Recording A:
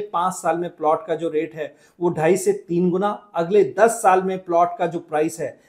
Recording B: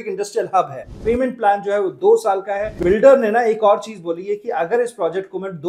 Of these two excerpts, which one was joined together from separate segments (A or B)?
B